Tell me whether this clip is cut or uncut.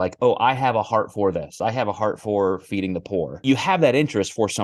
cut